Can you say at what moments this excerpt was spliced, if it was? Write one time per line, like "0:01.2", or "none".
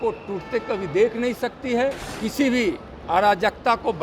0:02.1